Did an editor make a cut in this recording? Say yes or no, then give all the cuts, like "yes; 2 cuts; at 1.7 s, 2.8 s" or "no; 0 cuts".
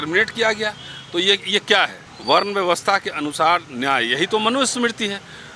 yes; 1 cut; at 2.1 s